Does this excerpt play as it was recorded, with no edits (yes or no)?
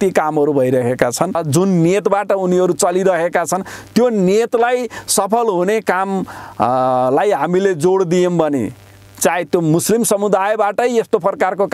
no